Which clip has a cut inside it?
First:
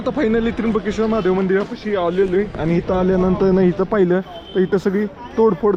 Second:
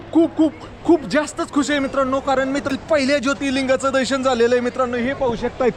second; 1 cut; at 2.7 s

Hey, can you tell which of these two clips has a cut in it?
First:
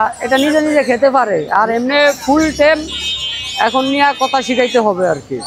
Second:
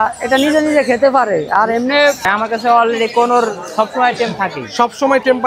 second; 1 cut; at 2.2 s

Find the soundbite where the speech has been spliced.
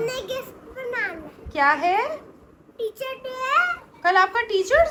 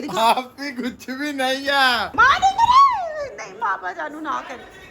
second; 1 cut; at 2.1 s

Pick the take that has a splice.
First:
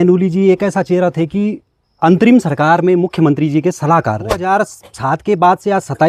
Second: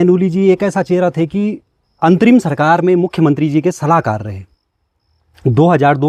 first; 1 cut; at 4.4 s

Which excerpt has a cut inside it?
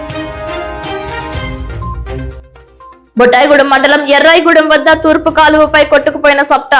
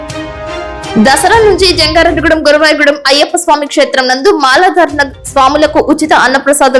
second; 1 cut; at 0.9 s

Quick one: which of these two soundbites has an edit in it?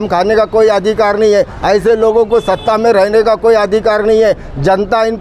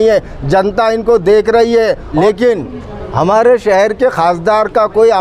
second; 1 cut; at 2.1 s

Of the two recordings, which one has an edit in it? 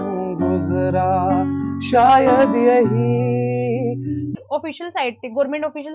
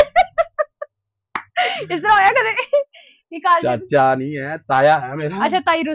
first; 1 cut; at 4.4 s

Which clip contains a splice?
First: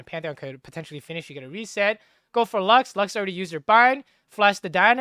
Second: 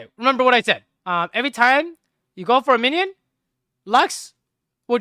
second; 1 cut; at 0.9 s

